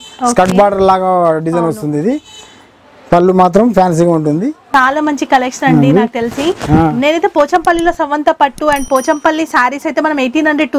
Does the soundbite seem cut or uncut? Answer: cut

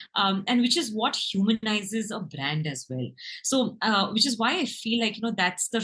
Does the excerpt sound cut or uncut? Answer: uncut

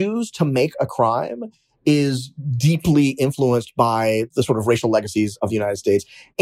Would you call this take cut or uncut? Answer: cut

